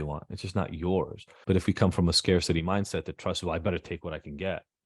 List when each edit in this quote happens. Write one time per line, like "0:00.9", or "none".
0:01.3